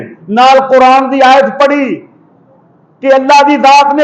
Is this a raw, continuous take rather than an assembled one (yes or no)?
yes